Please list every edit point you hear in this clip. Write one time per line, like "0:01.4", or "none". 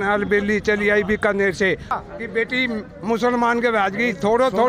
0:01.9